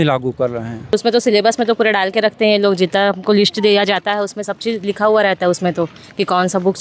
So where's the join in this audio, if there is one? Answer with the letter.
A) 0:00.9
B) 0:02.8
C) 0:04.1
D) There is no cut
A